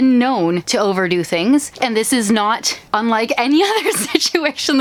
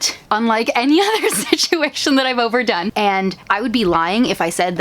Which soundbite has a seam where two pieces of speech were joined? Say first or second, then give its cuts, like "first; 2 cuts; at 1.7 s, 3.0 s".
second; 1 cut; at 3.3 s